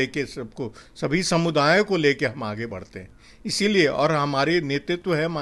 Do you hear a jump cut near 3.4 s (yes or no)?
no